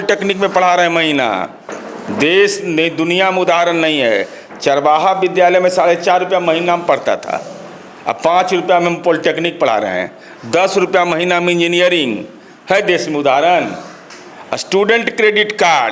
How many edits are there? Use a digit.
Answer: 0